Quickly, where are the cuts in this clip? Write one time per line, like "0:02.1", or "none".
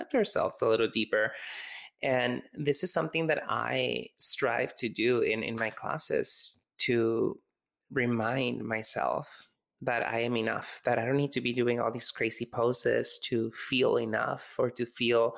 none